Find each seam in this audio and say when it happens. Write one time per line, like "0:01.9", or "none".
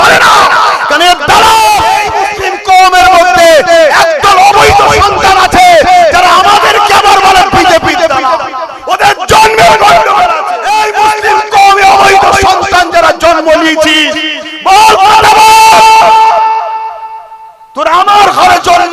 0:02.0
0:10.5

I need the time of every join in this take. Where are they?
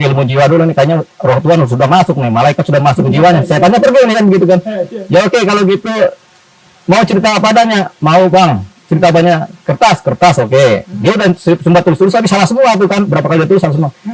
none

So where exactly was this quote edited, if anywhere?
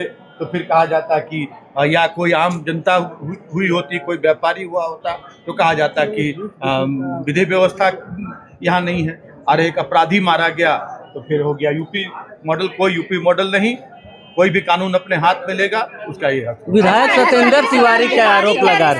none

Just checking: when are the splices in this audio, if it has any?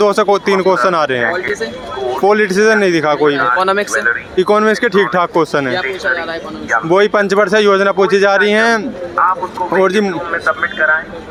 none

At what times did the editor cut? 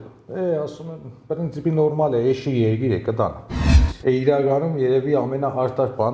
0:03.6

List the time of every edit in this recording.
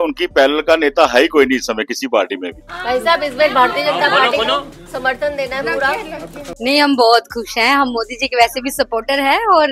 0:02.7
0:06.6

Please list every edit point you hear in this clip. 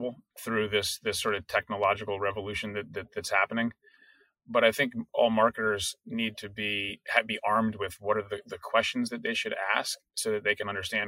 none

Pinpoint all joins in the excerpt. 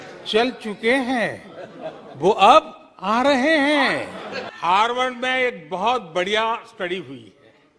0:04.4

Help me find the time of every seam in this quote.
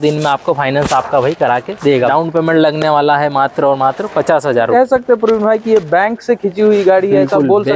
0:02.1
0:04.7

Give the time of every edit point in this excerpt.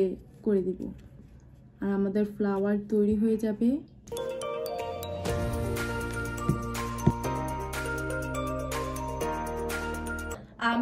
none

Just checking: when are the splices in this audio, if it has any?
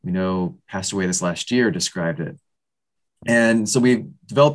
none

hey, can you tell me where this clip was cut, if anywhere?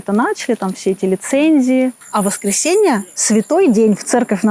0:02.0

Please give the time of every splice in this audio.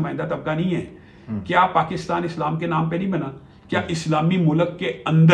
none

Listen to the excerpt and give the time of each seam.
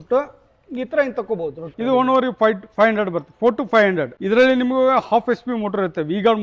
0:01.7

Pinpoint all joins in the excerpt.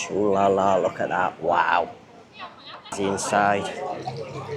0:03.0

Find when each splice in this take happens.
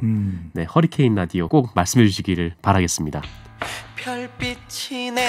0:01.5
0:02.6
0:03.4

